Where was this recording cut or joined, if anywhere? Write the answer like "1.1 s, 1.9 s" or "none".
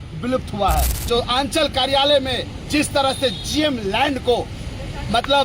1.0 s